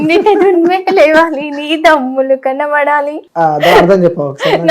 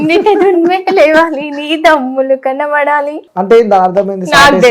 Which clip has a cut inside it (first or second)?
second